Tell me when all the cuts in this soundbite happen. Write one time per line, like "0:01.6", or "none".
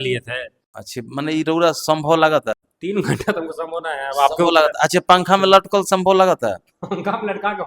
0:02.7